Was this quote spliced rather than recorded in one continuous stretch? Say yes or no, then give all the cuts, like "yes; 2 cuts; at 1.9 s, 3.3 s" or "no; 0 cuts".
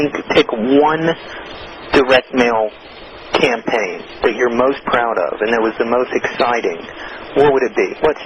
no; 0 cuts